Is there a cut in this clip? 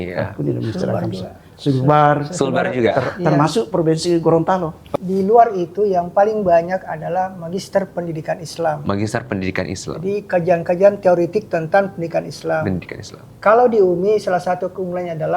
yes; 1 cut; at 4.9 s

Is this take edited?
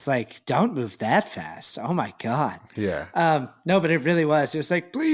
no; 0 cuts

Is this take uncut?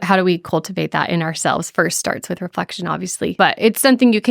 no; 1 cut; at 3.3 s

